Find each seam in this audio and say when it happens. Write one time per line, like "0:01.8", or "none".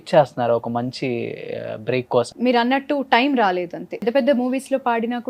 0:02.3
0:04.0